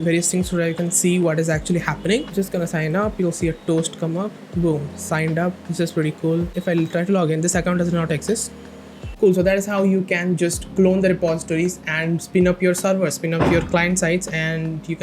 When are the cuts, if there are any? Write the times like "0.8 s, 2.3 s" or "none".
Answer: 2.3 s, 6.6 s, 9.0 s